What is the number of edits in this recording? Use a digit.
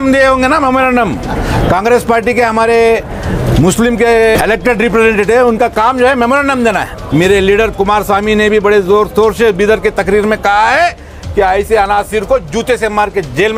2